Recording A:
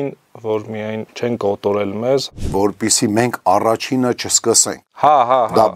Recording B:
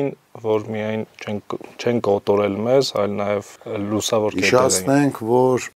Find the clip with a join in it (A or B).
A